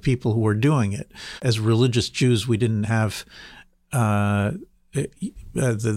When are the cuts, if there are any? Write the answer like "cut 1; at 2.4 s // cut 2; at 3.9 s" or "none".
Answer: cut 1; at 1.4 s